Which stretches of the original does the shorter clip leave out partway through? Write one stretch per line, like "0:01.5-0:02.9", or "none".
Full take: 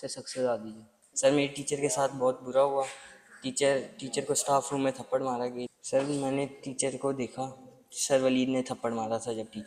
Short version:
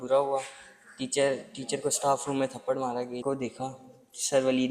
0:05.7-0:07.0